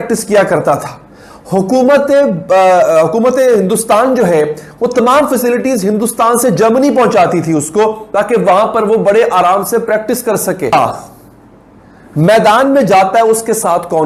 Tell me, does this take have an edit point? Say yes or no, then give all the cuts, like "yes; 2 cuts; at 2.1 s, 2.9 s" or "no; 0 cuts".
no; 0 cuts